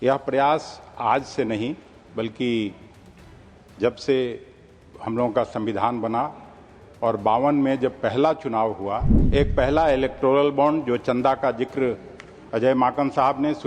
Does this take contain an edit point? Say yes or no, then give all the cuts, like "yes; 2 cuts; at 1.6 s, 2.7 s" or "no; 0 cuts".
yes; 1 cut; at 9.1 s